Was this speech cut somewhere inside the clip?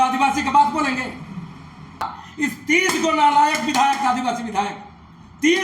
yes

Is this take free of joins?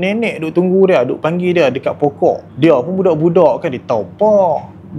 yes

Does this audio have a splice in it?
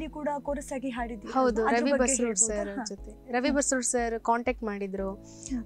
no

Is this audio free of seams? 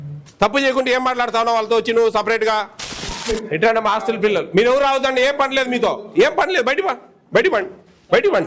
no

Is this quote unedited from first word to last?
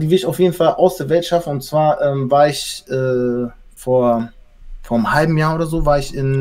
yes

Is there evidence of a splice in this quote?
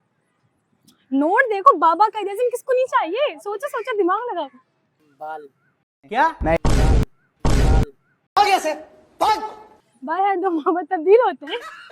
no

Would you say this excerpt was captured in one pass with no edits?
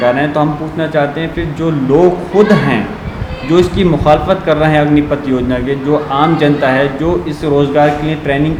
yes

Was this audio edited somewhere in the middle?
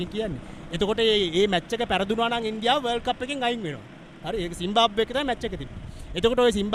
no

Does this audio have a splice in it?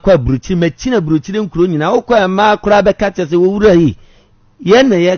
no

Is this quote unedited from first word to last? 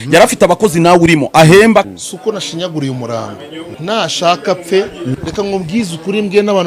no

